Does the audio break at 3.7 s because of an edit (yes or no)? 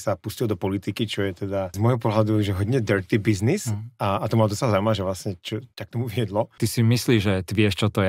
no